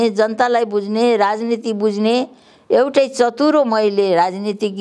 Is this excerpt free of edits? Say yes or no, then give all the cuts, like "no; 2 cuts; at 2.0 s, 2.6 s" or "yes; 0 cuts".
yes; 0 cuts